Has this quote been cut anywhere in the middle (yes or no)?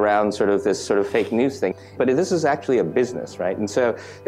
yes